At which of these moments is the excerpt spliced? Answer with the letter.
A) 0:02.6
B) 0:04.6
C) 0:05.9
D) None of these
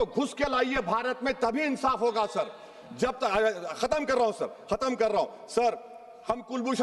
D